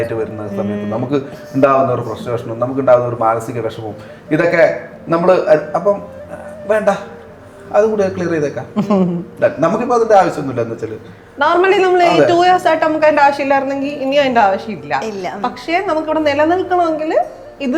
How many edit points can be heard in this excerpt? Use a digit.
0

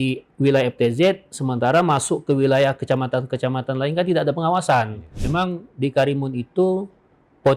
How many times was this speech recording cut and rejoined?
1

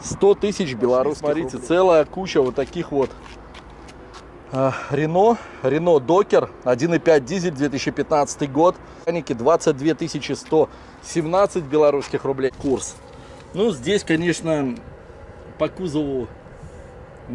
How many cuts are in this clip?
3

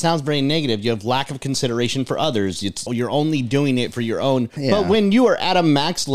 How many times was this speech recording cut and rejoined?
2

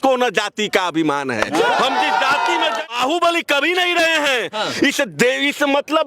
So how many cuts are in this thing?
1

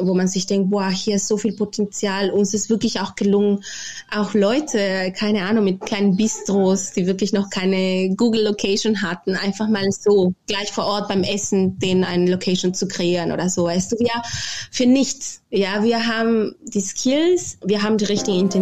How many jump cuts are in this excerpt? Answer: 2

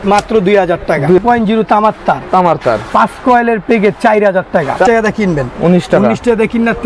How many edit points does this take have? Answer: 2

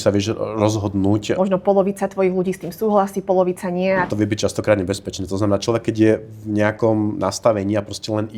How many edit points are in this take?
2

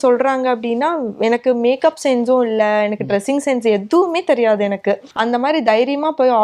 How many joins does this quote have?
1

